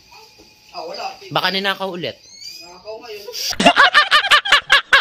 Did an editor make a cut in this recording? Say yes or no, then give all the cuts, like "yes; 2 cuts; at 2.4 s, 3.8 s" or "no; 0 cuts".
yes; 1 cut; at 3.5 s